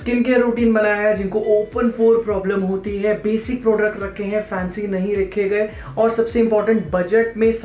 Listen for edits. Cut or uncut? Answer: uncut